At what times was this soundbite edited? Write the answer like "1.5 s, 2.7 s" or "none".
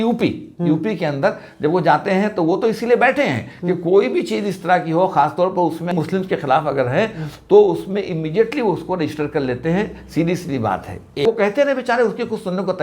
5.9 s, 11.2 s